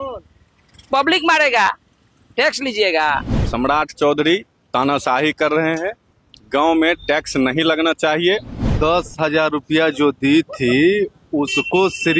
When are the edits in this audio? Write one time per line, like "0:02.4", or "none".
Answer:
0:03.4
0:08.7